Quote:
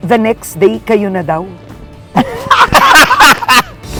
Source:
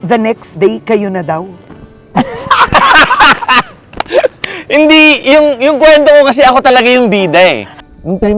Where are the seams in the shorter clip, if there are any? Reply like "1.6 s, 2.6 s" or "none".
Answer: none